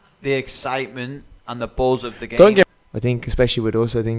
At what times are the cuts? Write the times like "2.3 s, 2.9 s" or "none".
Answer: 2.7 s